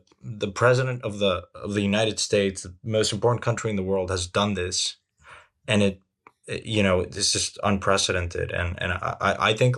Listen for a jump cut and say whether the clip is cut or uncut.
uncut